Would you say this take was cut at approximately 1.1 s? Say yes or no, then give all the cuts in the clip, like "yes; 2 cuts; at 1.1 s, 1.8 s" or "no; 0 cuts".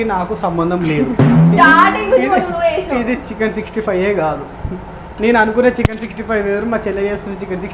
yes; 1 cut; at 1.1 s